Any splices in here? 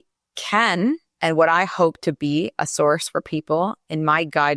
no; 0 cuts

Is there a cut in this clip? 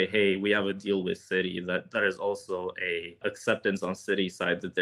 no; 0 cuts

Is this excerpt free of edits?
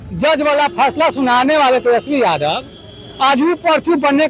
yes; 0 cuts

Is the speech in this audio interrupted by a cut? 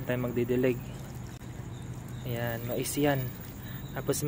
no; 0 cuts

